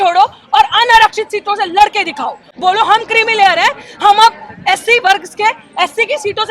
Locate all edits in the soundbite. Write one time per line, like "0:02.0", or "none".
none

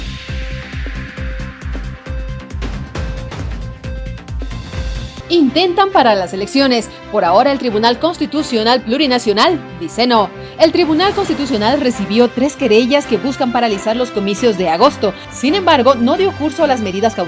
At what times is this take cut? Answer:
0:01.7

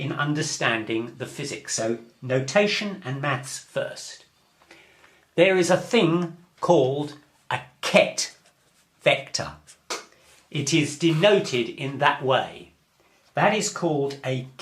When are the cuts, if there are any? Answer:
0:09.7

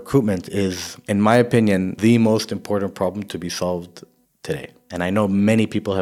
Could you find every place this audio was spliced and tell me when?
0:00.9
0:01.9
0:04.4

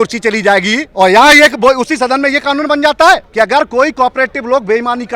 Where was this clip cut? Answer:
0:00.9
0:03.3

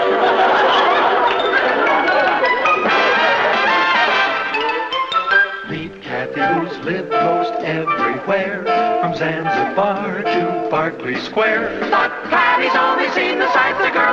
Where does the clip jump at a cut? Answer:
none

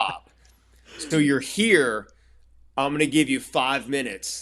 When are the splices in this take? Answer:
none

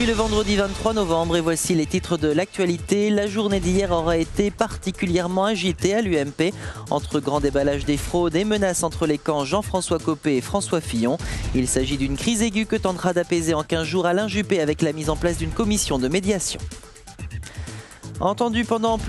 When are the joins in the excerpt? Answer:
none

